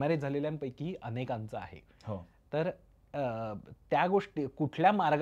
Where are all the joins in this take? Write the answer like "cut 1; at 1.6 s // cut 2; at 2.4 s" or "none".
none